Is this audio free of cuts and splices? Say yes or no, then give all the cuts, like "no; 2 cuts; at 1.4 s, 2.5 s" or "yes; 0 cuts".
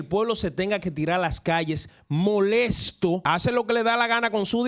no; 1 cut; at 3.2 s